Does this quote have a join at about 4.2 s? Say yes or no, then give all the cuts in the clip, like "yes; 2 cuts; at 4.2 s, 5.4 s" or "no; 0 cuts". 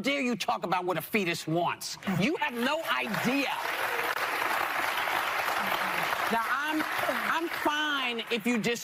yes; 1 cut; at 4.2 s